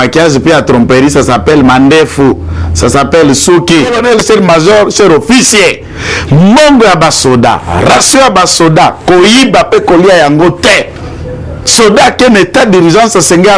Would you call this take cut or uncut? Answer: cut